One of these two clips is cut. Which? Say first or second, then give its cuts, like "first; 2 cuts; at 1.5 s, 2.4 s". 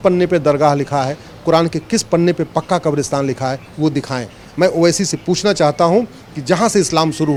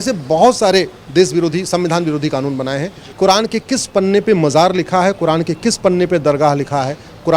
second; 1 cut; at 3.0 s